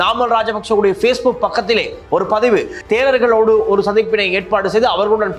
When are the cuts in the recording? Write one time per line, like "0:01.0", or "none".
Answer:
0:02.8